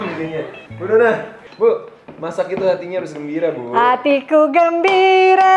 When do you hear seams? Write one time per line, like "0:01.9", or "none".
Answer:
0:01.4